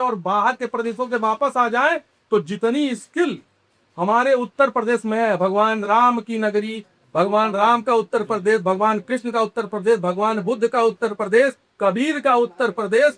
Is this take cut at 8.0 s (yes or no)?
no